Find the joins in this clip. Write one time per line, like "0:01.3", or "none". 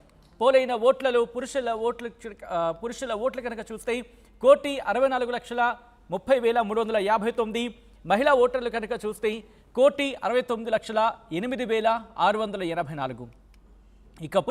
none